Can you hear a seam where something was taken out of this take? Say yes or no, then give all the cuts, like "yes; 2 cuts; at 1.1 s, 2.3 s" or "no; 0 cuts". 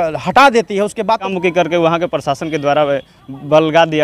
yes; 1 cut; at 1.3 s